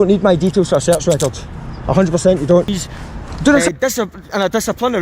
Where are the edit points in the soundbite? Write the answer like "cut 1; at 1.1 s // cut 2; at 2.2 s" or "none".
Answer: cut 1; at 3.6 s